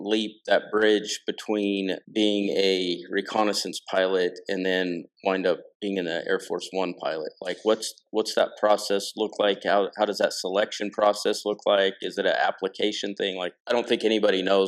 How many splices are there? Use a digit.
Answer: 0